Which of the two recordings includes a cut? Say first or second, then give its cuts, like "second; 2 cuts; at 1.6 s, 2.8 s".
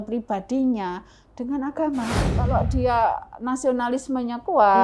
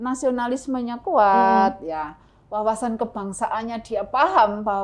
first; 1 cut; at 2.4 s